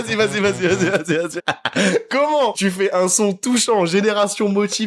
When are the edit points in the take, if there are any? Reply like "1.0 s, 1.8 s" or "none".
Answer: 1.3 s, 2.6 s